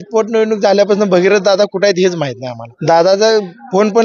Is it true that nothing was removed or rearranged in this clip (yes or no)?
no